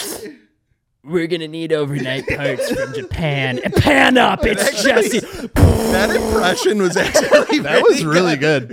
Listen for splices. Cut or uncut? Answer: uncut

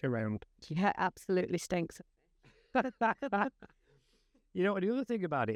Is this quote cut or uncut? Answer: uncut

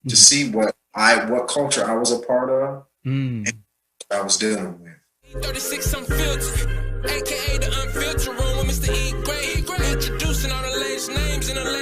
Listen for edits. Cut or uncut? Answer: cut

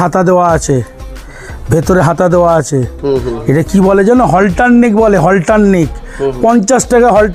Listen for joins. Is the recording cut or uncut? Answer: uncut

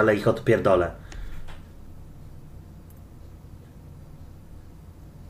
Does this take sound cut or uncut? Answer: uncut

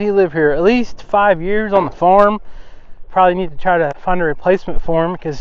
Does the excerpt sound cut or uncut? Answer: cut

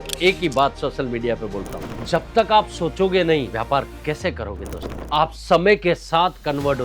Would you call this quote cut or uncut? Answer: cut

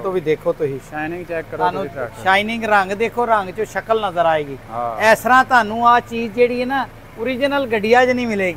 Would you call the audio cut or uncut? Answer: uncut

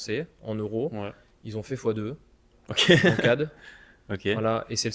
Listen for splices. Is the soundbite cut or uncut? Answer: uncut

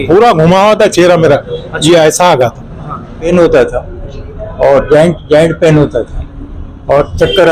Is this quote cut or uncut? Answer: cut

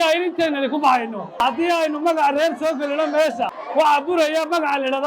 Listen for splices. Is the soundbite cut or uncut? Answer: cut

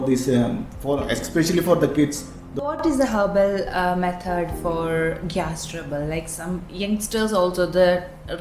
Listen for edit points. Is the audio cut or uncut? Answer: cut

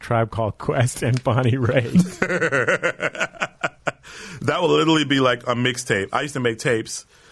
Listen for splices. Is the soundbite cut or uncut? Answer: uncut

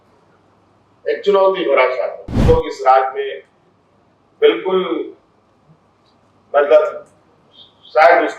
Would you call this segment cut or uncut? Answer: cut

